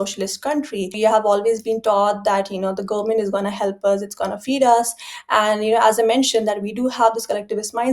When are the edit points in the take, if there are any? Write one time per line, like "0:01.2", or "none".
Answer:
0:00.9